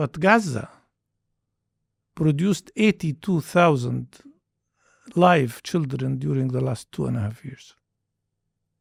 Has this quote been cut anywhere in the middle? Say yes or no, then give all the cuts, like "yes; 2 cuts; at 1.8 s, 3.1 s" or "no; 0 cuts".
no; 0 cuts